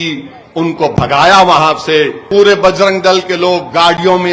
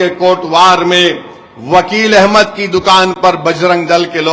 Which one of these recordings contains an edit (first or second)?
first